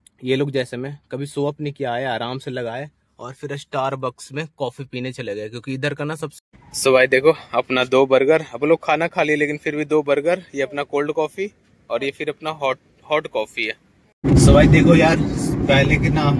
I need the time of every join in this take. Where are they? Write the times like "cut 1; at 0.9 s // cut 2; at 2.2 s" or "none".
cut 1; at 6.3 s // cut 2; at 14.1 s